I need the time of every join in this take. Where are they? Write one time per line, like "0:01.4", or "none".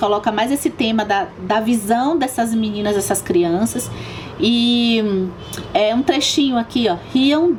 none